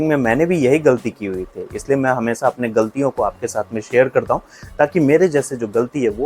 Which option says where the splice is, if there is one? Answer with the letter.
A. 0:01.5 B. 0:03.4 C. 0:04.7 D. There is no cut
D